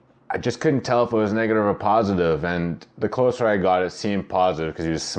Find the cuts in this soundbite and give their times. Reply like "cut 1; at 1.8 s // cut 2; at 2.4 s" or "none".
cut 1; at 2.7 s